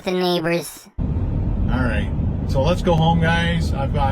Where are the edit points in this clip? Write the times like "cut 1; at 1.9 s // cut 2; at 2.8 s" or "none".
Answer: cut 1; at 0.9 s